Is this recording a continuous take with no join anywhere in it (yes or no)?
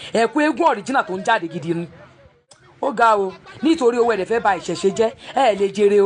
no